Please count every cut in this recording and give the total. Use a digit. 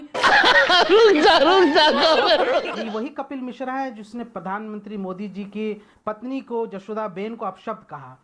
1